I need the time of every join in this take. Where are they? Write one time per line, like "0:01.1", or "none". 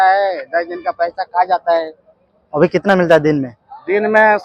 none